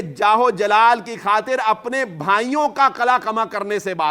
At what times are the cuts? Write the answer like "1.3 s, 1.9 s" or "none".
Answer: none

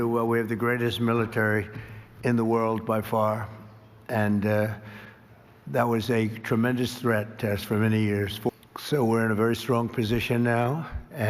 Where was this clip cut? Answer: 8.5 s

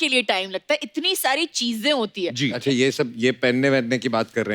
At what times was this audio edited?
2.6 s

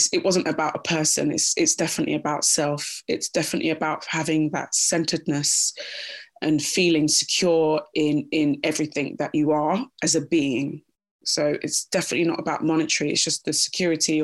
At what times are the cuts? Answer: none

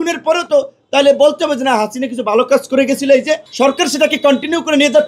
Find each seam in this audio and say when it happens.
3.5 s

